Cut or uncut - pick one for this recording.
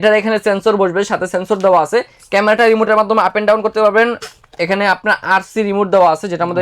uncut